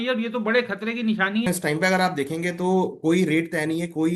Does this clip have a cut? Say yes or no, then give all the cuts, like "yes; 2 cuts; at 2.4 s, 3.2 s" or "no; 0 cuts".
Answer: yes; 1 cut; at 1.5 s